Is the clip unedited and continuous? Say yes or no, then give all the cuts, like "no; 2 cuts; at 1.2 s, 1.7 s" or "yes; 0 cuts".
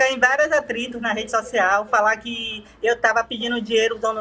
yes; 0 cuts